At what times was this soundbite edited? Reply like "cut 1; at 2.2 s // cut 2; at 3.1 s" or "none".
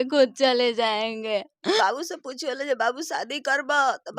cut 1; at 1.8 s